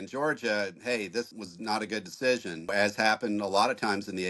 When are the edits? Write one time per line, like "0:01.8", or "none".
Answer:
0:01.4
0:02.7